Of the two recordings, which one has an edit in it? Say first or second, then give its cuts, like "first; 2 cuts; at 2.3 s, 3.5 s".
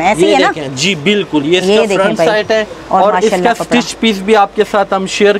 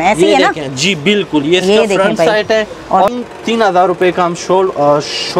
second; 1 cut; at 3.1 s